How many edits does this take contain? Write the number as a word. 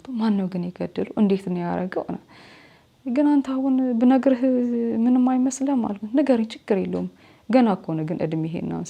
zero